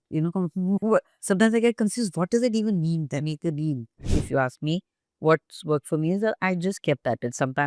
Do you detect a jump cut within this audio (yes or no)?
yes